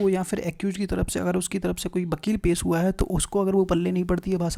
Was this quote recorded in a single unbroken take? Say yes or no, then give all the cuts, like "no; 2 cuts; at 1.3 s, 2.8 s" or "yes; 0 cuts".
yes; 0 cuts